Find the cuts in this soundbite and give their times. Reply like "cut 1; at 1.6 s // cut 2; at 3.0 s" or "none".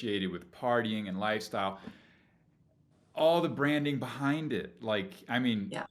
none